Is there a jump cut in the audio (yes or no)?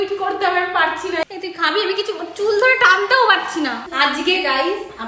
yes